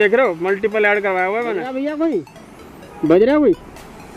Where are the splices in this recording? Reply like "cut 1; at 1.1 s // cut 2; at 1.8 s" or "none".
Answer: cut 1; at 1.7 s